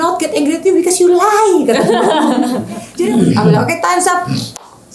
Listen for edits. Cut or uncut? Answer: cut